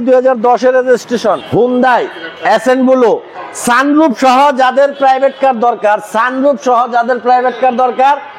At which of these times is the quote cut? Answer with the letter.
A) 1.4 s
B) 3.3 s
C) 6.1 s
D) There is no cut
A